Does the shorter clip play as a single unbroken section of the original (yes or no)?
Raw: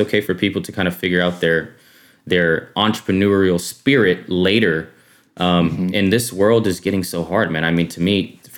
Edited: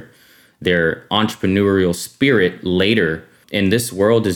no